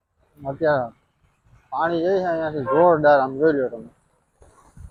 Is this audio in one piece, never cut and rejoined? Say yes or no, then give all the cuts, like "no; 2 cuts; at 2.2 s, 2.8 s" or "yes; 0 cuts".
yes; 0 cuts